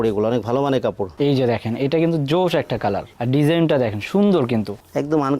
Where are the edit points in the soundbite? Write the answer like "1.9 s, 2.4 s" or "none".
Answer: 1.1 s